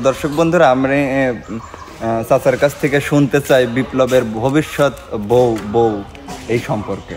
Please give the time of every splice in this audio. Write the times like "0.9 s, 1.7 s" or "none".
none